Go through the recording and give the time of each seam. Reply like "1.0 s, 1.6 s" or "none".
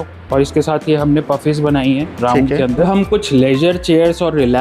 2.8 s